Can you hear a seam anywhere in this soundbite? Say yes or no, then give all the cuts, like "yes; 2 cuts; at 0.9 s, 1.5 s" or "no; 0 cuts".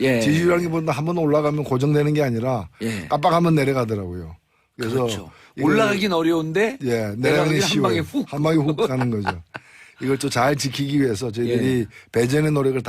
no; 0 cuts